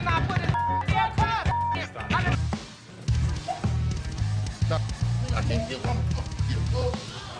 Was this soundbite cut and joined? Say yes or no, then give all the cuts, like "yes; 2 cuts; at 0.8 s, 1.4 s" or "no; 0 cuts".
yes; 1 cut; at 2.4 s